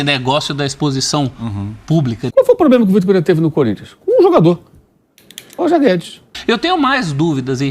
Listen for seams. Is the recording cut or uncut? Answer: cut